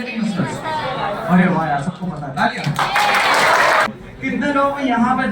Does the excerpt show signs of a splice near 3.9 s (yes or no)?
yes